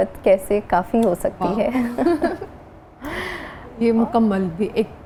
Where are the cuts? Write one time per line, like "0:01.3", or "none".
none